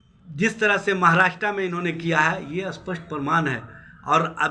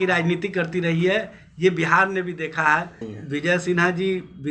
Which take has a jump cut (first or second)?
second